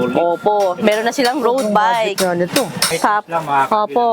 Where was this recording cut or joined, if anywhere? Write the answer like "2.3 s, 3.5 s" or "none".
2.9 s